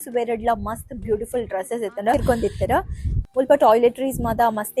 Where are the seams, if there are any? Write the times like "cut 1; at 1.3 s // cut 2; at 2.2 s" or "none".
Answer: cut 1; at 2.1 s